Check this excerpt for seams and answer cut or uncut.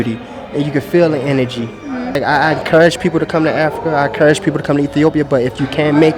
cut